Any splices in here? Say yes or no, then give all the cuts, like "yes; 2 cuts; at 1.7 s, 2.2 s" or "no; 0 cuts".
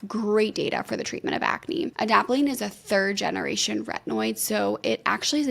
yes; 1 cut; at 1.9 s